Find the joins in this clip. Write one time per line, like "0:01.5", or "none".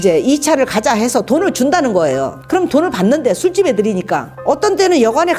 none